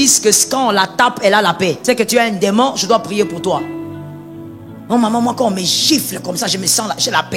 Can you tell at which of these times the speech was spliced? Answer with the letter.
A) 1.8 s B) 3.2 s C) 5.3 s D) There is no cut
A